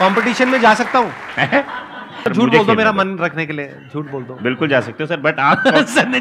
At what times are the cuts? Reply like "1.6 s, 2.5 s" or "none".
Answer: 2.2 s